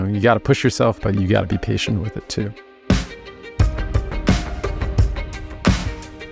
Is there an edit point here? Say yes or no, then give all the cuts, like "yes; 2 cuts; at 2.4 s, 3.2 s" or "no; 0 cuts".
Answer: yes; 2 cuts; at 1.0 s, 2.6 s